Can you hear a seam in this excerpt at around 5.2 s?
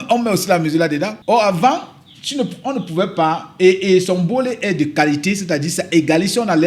no; 1 cut; at 1.2 s

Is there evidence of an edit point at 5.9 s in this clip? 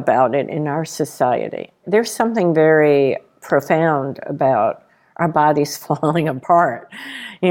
no; 1 cut; at 1.8 s

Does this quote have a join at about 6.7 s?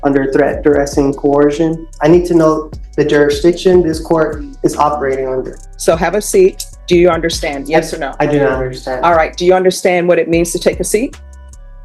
yes; 3 cuts; at 1.9 s, 5.6 s, 6.7 s

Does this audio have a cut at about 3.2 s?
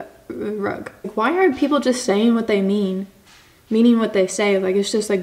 no; 1 cut; at 1.1 s

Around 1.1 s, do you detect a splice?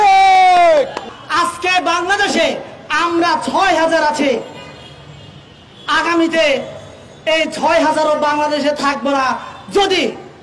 yes; 1 cut; at 1.1 s

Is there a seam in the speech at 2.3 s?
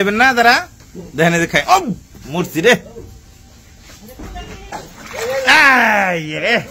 no; 1 cut; at 4.7 s

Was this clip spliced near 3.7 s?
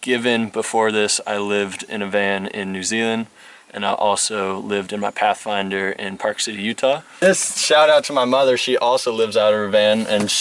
no; 1 cut; at 7.2 s

